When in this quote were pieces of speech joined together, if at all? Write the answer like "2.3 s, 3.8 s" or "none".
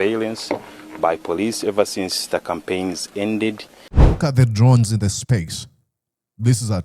3.9 s